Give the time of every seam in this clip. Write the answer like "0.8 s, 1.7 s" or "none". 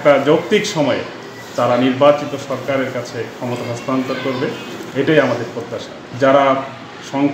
6.0 s